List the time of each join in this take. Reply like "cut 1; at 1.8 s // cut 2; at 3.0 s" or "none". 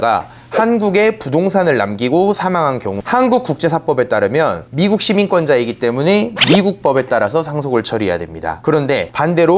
cut 1; at 3.0 s